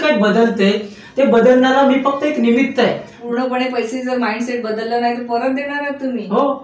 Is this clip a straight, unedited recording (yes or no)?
no